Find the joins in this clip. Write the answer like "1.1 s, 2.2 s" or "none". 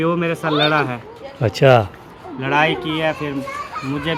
none